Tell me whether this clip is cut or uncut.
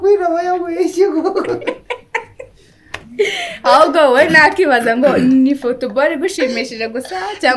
uncut